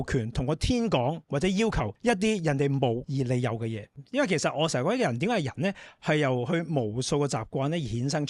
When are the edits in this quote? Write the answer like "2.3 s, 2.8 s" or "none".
1.9 s, 3.6 s